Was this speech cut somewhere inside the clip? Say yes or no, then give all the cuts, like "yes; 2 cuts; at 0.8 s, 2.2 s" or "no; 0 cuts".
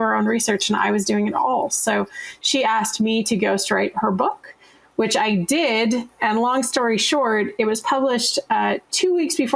no; 0 cuts